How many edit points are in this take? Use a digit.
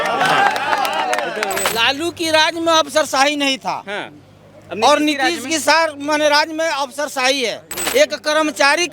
2